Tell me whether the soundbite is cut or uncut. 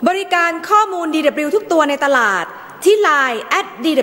uncut